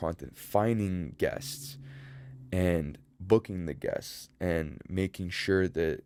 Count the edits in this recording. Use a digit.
0